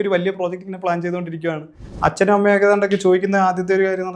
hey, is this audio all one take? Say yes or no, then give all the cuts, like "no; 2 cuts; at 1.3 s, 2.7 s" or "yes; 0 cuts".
no; 1 cut; at 1.8 s